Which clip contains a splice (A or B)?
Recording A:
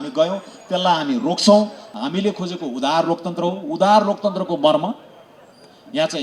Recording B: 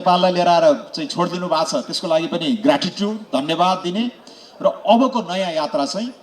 A